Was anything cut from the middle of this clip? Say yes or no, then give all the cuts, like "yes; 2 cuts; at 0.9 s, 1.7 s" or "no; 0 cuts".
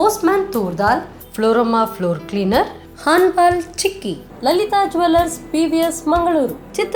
no; 0 cuts